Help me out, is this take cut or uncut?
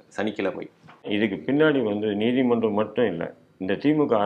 cut